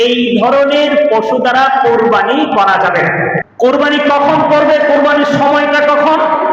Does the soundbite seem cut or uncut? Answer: cut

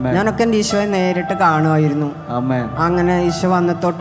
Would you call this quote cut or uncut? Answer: uncut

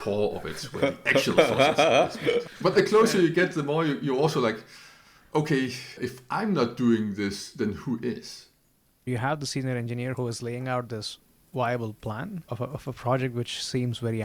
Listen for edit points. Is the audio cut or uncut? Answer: cut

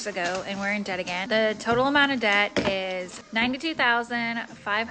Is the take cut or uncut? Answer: cut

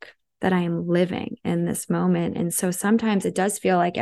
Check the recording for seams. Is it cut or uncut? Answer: uncut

